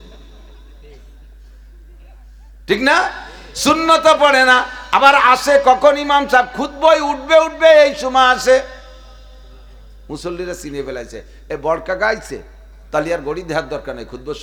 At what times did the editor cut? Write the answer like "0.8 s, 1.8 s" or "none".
none